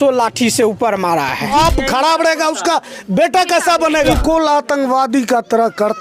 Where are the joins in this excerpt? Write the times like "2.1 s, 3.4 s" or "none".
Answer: 1.6 s, 4.2 s